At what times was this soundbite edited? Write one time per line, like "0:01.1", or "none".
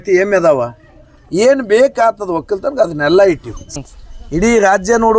0:03.6